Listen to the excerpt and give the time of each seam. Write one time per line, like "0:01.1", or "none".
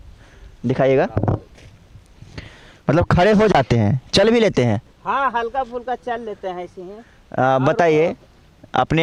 none

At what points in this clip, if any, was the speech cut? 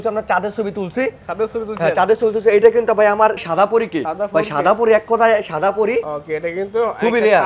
0:03.4
0:06.0

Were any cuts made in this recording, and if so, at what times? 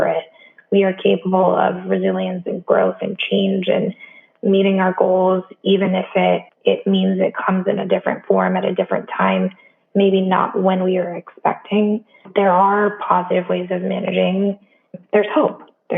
0:06.5
0:12.3
0:14.8

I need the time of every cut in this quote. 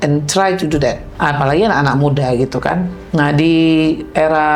0:01.1

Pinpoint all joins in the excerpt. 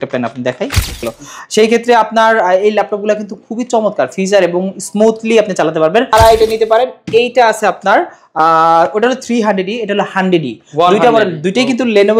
0:01.0
0:06.1

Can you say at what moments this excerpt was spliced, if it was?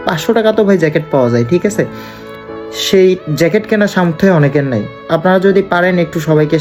none

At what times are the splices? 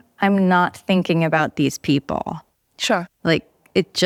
none

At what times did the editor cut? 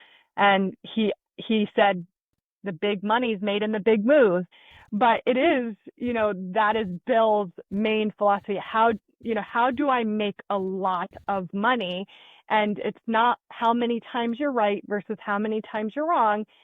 0:04.5

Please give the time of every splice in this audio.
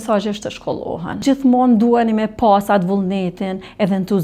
0:01.2

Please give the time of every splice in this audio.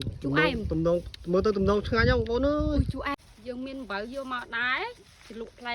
0:03.0

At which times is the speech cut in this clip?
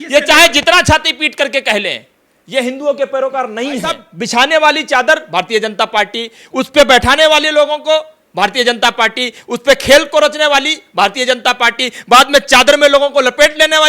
0:04.1

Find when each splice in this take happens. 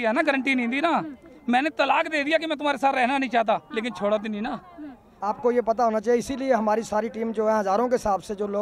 0:05.1

